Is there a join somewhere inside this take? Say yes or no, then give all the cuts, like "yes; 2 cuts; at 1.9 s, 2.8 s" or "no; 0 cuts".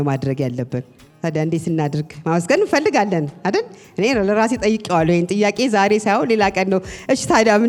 no; 0 cuts